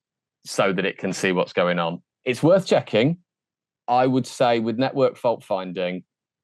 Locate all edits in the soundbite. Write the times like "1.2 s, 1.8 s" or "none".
2.1 s